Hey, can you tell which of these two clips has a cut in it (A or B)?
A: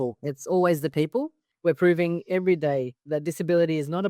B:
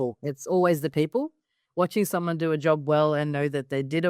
A